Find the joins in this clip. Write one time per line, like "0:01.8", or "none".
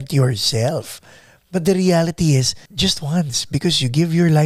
0:02.6